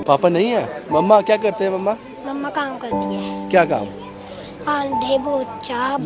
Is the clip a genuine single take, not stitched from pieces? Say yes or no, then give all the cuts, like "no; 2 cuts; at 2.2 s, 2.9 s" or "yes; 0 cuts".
yes; 0 cuts